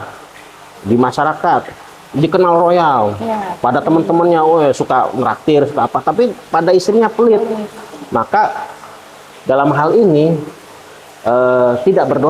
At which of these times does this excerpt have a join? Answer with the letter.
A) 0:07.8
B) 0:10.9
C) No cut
C